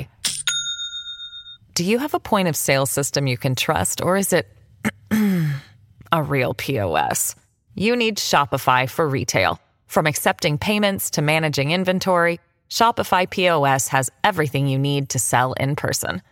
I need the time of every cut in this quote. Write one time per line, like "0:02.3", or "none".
none